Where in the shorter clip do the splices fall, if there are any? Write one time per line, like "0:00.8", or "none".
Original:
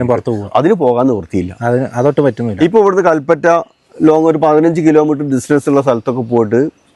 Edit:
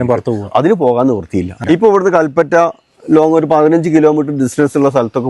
0:01.5